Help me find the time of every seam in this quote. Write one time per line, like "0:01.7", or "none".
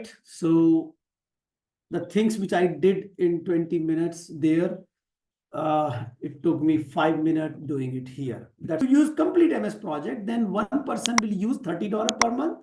0:08.8